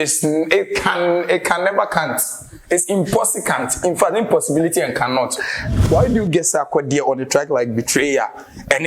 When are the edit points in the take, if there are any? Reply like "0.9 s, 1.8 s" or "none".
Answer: 5.7 s